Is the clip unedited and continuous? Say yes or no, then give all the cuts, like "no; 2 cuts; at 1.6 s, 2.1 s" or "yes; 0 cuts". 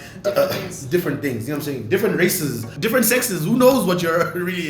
no; 1 cut; at 2.7 s